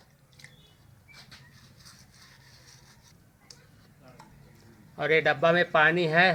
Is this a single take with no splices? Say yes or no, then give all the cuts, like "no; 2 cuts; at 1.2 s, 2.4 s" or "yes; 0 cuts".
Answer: yes; 0 cuts